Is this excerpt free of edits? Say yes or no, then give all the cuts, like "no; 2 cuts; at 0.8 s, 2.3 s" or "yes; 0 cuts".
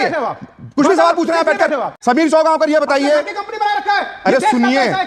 no; 1 cut; at 1.9 s